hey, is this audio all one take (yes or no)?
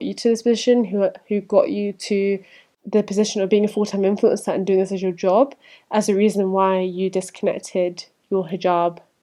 yes